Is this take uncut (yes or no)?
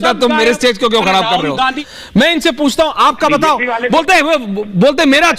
no